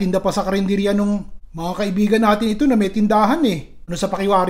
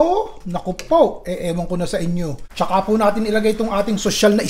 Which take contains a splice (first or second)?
second